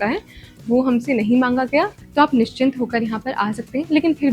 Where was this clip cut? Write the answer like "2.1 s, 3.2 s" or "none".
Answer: none

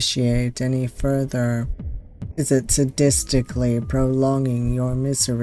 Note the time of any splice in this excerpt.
none

